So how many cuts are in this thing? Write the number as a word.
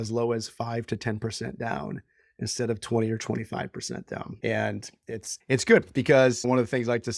three